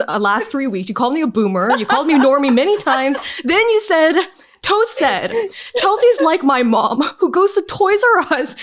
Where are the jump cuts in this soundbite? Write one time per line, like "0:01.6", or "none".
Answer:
none